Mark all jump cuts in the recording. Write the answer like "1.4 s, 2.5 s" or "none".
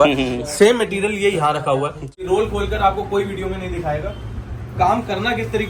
2.3 s